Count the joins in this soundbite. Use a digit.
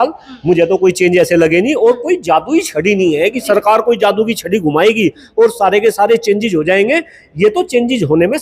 0